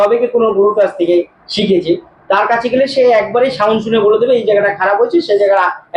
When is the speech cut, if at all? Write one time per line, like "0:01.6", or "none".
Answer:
none

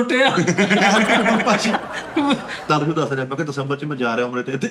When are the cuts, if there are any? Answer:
0:02.6

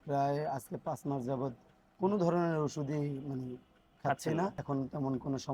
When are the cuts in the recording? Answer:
0:04.6

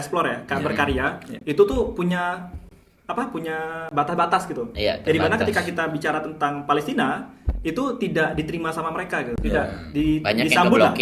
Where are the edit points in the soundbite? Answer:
none

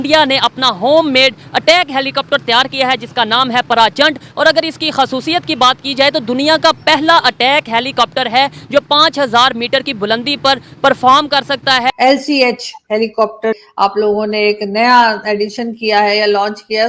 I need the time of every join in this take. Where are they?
0:11.9
0:13.6

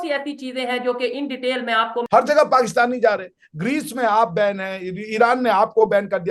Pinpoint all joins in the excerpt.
0:02.0

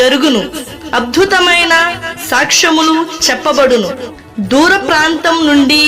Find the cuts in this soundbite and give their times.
0:03.7

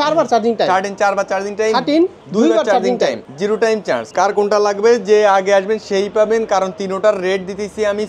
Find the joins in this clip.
0:02.2
0:04.1

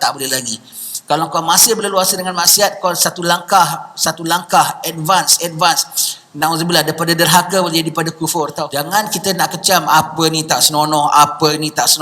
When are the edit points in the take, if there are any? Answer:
0:08.6

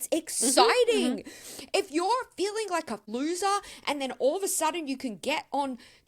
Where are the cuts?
0:03.1

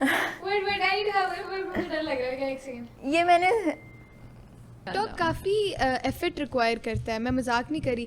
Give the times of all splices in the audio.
0:04.9

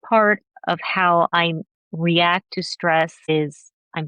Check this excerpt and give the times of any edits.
0:01.3
0:03.3

